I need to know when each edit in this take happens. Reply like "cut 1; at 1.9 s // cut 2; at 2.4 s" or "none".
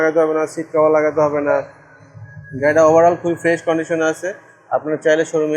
none

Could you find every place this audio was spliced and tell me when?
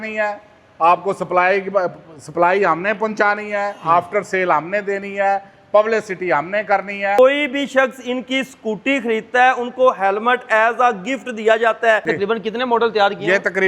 cut 1; at 7.2 s // cut 2; at 12.1 s

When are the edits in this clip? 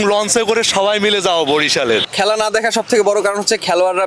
cut 1; at 2.1 s

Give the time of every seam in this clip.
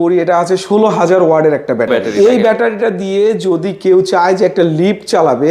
cut 1; at 2.0 s

